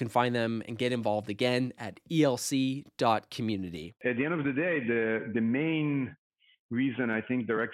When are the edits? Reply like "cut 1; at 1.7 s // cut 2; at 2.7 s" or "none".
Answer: cut 1; at 3.8 s